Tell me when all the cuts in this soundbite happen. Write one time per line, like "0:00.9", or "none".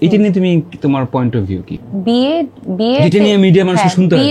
none